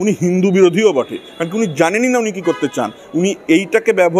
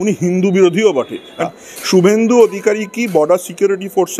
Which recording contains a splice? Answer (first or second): second